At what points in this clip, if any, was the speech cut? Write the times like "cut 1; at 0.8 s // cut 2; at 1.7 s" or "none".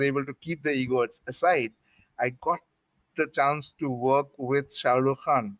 none